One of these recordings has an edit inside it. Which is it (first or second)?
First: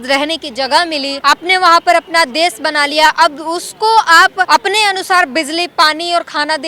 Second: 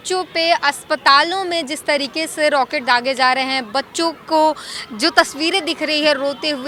first